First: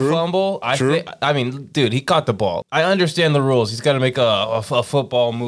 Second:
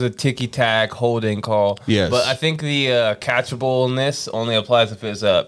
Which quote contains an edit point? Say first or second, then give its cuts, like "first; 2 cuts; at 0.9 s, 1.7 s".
first; 1 cut; at 2.6 s